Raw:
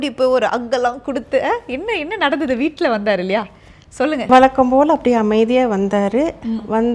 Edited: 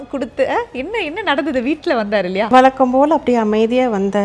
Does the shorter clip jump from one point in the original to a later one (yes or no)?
yes